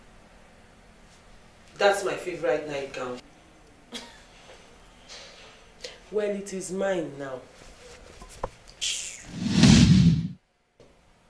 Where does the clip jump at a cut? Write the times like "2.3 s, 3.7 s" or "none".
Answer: none